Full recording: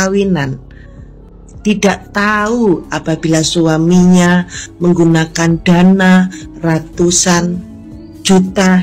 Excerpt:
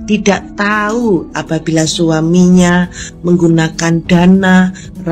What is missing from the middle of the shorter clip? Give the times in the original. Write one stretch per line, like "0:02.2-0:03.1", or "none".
none